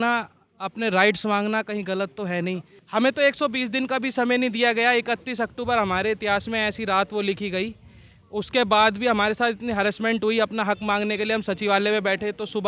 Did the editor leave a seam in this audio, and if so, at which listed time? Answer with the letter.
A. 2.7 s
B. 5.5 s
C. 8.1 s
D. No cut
A